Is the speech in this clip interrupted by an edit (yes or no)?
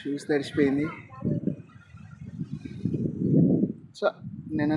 no